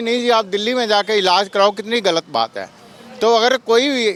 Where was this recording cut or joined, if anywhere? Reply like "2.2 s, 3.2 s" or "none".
none